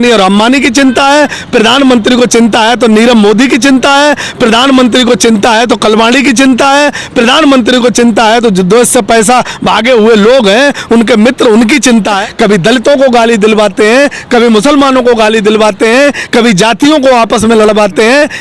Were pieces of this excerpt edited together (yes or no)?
yes